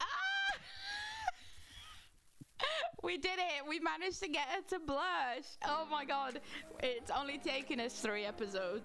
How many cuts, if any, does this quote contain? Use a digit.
0